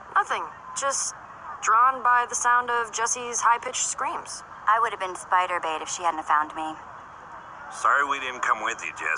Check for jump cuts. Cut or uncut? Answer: cut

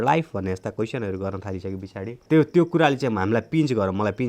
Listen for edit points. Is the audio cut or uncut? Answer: cut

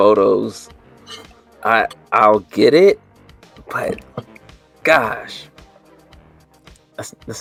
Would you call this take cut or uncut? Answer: uncut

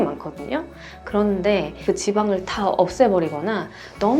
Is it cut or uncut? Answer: cut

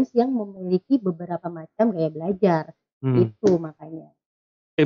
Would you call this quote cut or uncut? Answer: uncut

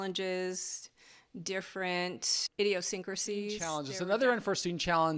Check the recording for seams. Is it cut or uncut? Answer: cut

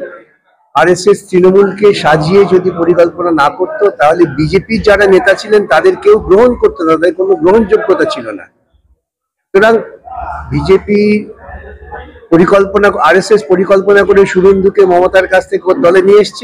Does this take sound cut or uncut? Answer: uncut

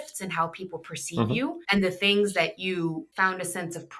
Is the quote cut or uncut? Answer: cut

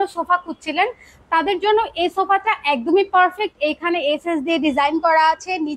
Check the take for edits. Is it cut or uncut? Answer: uncut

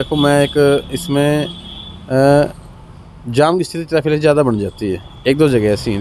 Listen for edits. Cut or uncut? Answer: uncut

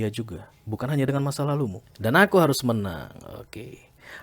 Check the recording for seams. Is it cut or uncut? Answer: cut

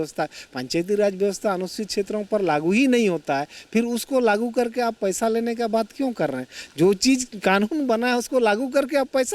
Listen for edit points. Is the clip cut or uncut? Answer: uncut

